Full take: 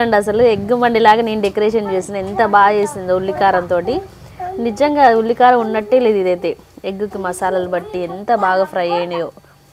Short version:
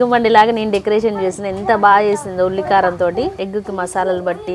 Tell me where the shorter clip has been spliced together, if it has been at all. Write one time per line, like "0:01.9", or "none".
0:03.4